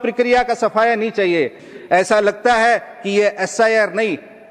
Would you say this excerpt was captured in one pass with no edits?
no; 1 cut; at 1.6 s

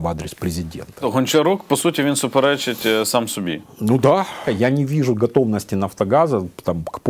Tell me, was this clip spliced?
yes; 2 cuts; at 1.0 s, 4.5 s

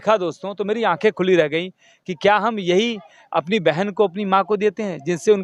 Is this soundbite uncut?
yes; 0 cuts

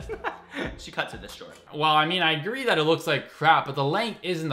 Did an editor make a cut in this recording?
yes; 1 cut; at 1.6 s

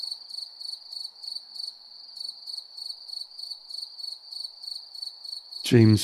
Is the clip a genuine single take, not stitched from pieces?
yes; 0 cuts

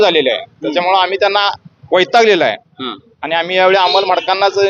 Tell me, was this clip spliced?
no; 0 cuts

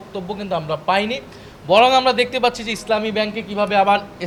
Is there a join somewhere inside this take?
no; 0 cuts

